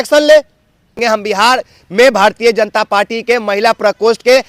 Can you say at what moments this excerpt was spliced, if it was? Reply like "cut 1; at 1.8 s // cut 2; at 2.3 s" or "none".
cut 1; at 1.0 s